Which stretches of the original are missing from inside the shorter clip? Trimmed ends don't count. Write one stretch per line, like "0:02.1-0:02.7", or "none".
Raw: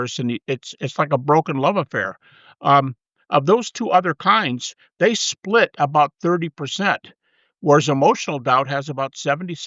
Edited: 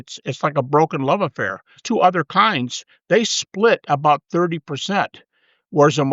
0:02.3-0:03.7